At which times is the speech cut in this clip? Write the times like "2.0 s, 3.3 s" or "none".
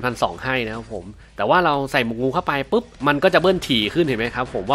2.9 s